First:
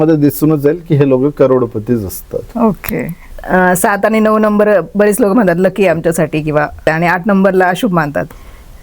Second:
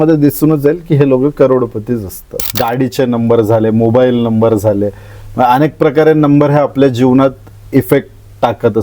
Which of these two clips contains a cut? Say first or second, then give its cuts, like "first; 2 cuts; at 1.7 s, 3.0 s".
second; 1 cut; at 2.4 s